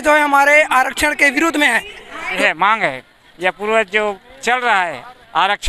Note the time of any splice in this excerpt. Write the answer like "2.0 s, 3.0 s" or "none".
2.3 s